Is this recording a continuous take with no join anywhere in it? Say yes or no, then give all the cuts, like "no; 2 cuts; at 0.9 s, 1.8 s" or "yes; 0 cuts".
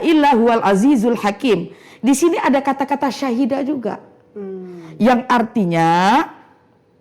yes; 0 cuts